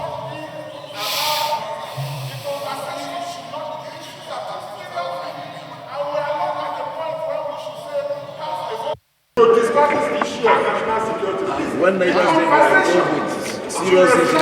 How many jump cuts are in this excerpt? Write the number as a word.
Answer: one